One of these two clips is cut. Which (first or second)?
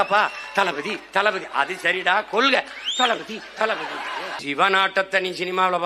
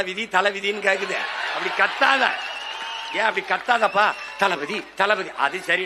first